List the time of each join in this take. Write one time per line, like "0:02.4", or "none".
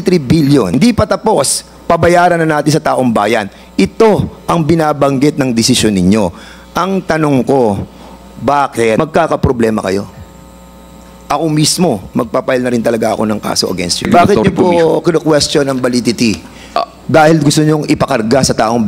0:00.7
0:09.0
0:14.1